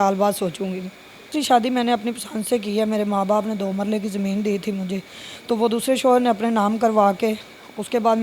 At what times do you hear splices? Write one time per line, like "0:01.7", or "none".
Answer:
0:01.3

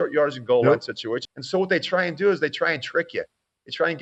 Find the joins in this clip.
0:01.2

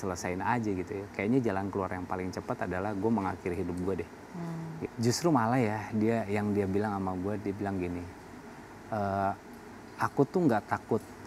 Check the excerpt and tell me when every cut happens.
0:04.8

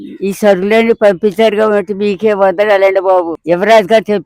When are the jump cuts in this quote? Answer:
0:03.4

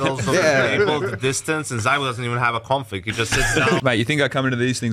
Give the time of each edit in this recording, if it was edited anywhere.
0:03.8

